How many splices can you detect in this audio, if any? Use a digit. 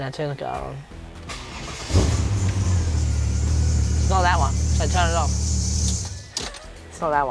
0